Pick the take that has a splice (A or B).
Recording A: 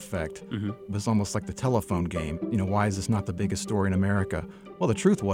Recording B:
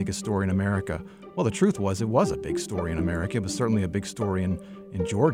A